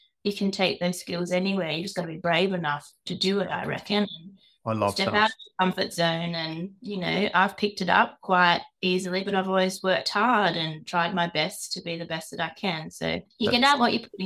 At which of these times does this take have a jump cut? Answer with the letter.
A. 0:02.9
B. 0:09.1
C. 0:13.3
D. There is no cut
C